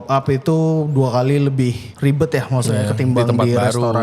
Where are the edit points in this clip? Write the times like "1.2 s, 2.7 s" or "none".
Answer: 1.9 s